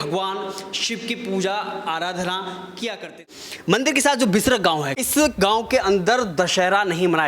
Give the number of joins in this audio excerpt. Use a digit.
2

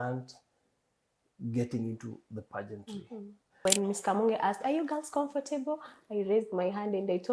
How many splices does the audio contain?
1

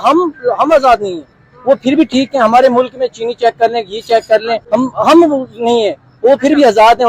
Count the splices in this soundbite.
1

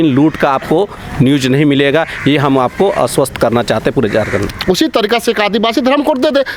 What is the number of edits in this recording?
1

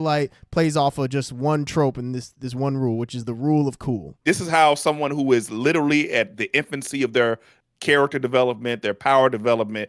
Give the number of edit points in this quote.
1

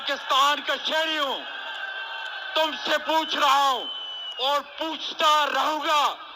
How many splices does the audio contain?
0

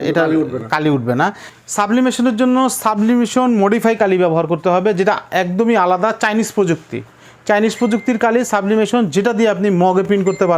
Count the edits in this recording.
1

